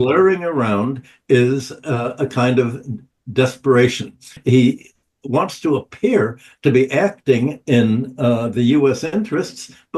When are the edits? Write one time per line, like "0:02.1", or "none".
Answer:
0:04.3